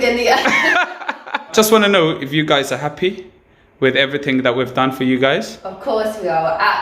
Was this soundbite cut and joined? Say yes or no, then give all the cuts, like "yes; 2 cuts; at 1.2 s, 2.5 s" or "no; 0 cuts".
yes; 1 cut; at 1.5 s